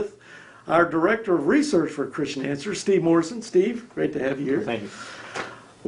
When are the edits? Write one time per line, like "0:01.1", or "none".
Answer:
none